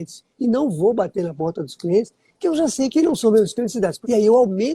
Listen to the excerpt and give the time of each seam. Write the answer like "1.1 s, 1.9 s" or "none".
2.9 s, 4.0 s